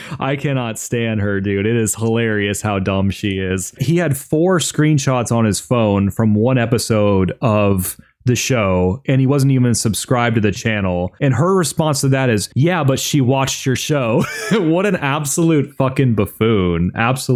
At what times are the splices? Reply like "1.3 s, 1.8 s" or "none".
none